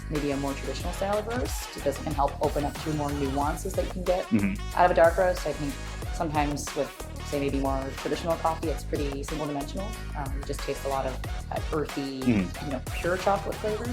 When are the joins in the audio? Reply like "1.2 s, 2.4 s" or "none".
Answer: none